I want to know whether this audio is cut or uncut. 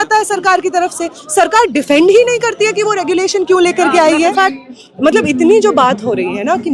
cut